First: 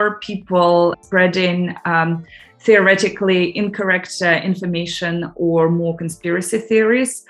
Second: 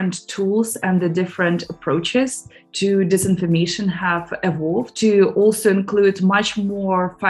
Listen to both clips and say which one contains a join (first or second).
first